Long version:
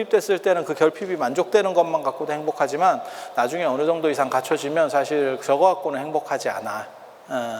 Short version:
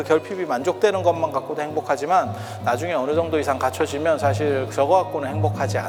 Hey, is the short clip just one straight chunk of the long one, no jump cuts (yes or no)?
yes